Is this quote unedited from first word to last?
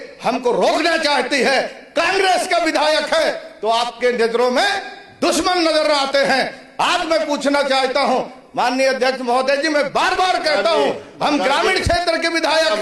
yes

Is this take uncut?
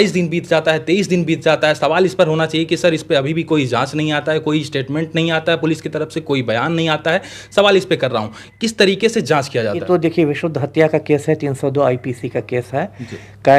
yes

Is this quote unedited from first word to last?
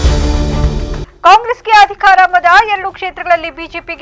yes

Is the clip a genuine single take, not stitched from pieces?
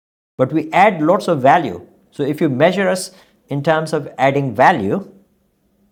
yes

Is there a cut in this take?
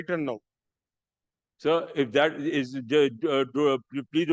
no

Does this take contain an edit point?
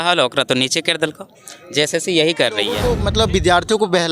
yes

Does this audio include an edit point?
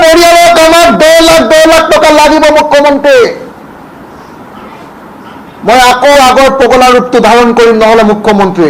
no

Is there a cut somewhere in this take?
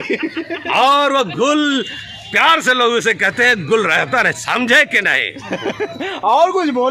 no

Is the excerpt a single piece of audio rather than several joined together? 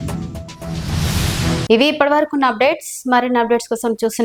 yes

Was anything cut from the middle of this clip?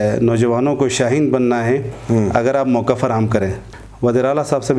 yes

